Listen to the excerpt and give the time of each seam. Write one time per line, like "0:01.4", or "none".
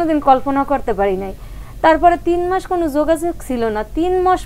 none